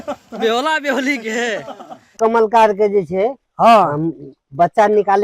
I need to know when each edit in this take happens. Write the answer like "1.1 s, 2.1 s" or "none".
2.2 s